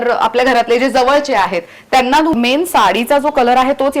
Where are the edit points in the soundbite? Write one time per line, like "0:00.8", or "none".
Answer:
0:02.3

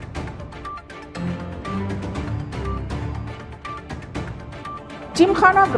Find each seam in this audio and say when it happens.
0:01.8

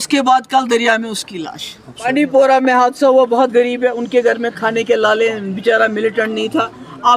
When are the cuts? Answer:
0:02.1

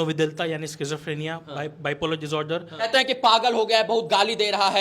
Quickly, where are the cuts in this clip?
0:02.7

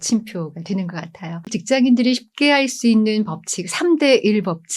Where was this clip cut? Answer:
0:01.5

